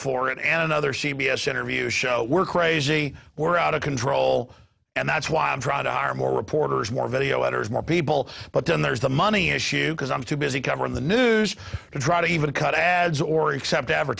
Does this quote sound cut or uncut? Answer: uncut